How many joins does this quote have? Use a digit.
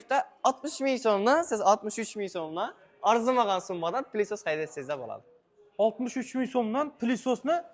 0